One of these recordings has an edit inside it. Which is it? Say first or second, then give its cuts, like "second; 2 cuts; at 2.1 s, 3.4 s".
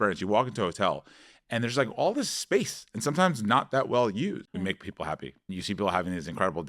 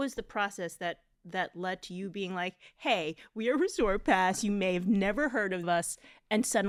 first; 1 cut; at 4.4 s